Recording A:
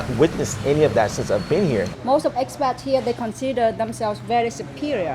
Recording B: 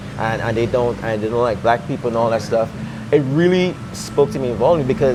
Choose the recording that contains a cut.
A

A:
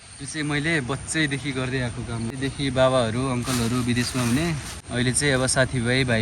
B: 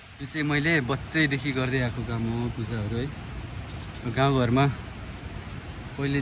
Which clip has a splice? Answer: A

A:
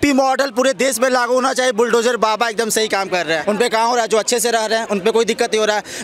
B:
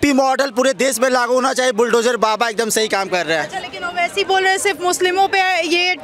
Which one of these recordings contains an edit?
A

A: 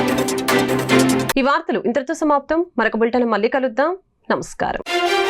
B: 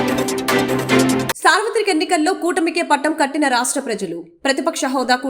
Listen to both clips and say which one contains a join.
B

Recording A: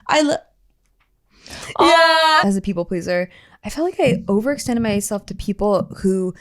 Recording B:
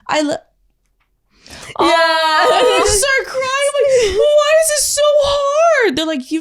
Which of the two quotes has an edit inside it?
A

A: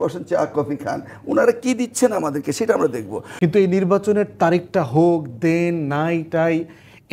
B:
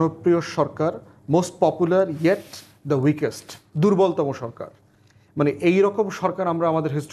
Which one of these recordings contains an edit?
A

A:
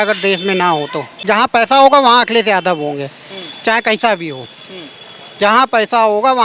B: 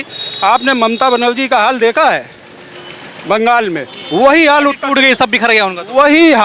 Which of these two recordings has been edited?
A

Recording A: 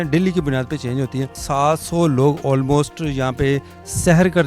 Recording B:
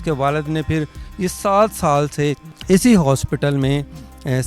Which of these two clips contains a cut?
A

